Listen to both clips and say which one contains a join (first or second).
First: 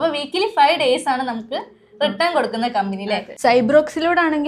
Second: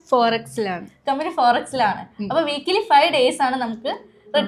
first